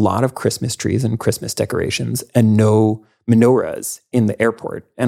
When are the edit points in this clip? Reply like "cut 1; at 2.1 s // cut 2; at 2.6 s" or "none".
none

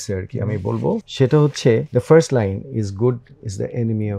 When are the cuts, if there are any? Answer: cut 1; at 1.1 s // cut 2; at 1.9 s

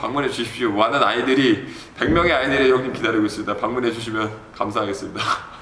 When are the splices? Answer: none

